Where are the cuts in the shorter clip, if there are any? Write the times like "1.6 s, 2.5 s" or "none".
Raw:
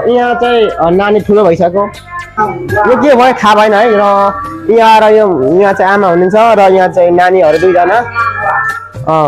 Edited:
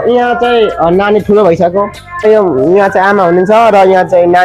2.2 s